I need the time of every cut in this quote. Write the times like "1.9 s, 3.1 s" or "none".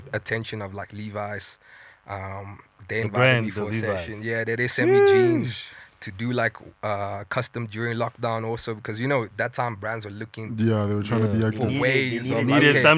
none